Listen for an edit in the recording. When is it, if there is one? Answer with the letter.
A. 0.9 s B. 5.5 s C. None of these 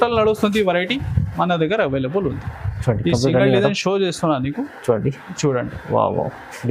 C